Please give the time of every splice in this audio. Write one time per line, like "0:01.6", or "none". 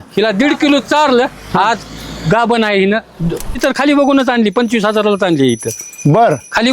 0:03.5